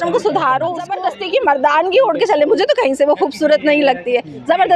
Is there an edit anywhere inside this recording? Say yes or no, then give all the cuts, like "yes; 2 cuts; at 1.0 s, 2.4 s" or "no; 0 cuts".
yes; 1 cut; at 1.0 s